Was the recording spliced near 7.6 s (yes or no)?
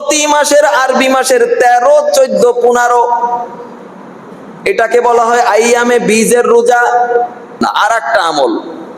yes